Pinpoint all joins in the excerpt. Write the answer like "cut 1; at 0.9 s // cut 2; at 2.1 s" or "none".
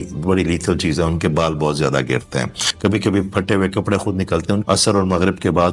cut 1; at 2.6 s // cut 2; at 4.6 s